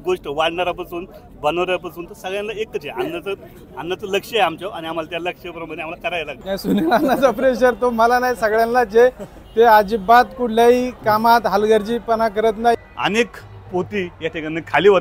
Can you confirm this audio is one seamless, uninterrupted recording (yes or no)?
no